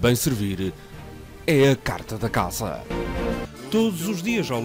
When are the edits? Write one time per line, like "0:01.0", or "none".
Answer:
0:03.5